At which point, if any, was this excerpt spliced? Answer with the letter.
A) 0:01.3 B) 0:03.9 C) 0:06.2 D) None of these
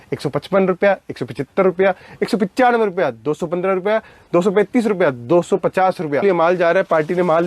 C